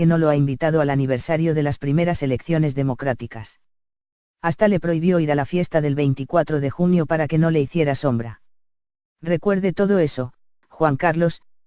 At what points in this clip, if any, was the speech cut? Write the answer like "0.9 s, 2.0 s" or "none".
6.7 s